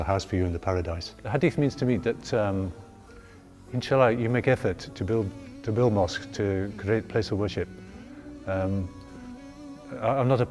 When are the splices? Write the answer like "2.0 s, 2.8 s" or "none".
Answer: none